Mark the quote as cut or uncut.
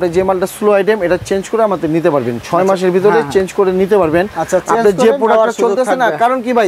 uncut